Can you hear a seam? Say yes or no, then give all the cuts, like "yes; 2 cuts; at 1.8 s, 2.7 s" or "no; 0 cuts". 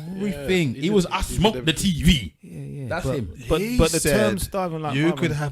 yes; 1 cut; at 2.4 s